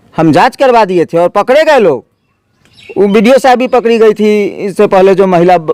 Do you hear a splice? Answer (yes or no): no